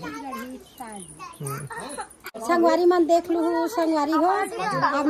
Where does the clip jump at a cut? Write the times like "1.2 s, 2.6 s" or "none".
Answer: 2.4 s

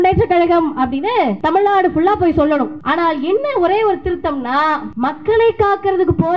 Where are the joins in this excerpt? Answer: 1.4 s, 2.8 s, 4.9 s

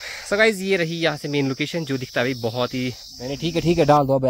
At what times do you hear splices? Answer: 3.4 s

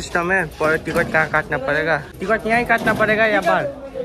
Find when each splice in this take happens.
2.1 s

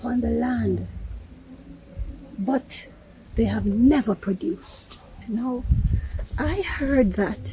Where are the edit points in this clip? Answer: 5.2 s

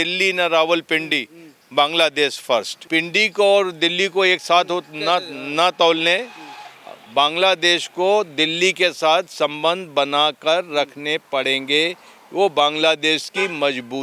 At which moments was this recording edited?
2.8 s

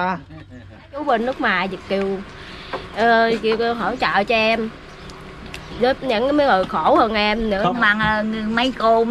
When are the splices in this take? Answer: 1.0 s, 7.8 s

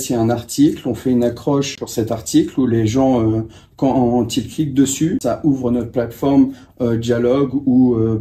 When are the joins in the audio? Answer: 1.8 s, 5.2 s

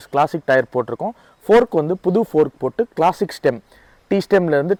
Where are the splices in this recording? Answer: none

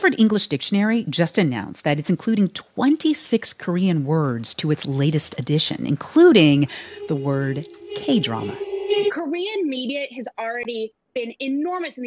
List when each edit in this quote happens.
9.1 s

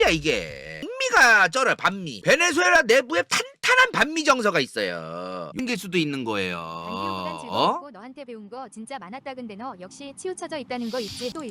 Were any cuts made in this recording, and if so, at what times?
0.9 s, 5.5 s

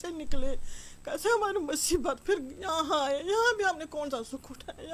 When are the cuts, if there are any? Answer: none

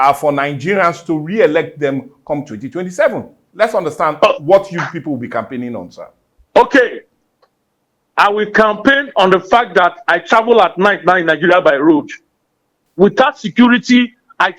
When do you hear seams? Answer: 12.8 s

